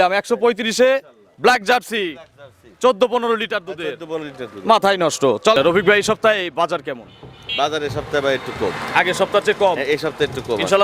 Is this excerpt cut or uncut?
cut